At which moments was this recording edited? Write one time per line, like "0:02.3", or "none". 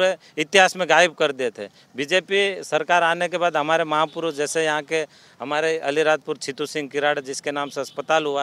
none